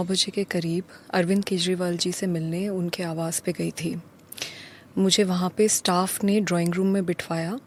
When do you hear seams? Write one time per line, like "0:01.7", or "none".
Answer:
none